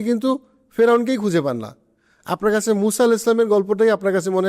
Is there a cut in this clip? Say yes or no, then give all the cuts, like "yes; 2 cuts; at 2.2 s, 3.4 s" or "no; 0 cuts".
no; 0 cuts